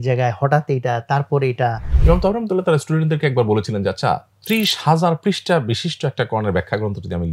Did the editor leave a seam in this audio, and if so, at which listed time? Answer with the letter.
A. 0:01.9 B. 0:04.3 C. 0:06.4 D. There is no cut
A